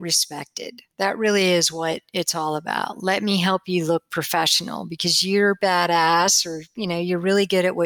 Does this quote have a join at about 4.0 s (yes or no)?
no